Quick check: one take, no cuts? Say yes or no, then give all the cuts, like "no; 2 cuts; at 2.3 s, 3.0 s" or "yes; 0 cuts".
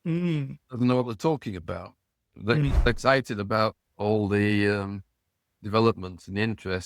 no; 1 cut; at 2.9 s